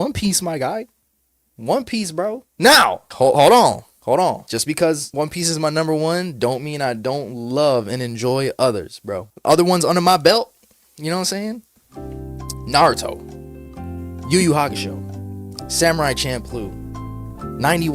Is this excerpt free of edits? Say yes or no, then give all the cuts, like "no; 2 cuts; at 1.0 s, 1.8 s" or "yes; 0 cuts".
no; 2 cuts; at 2.5 s, 3.1 s